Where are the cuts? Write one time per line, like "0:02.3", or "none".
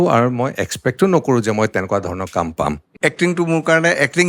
0:02.9